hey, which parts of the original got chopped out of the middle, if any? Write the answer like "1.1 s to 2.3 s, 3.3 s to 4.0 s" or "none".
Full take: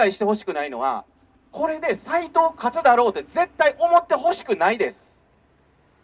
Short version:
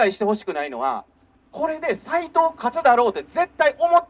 none